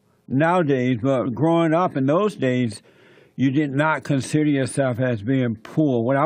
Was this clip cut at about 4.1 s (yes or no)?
no